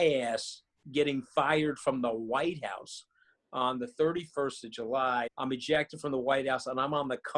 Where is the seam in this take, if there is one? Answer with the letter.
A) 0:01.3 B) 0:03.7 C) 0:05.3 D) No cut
C